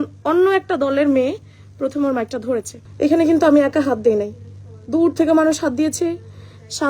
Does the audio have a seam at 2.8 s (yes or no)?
yes